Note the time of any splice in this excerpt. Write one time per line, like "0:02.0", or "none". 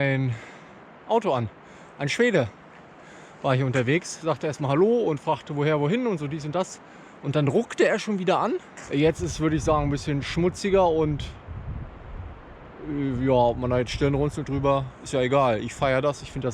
0:08.7